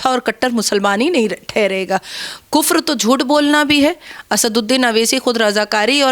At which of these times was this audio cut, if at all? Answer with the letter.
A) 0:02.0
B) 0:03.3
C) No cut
C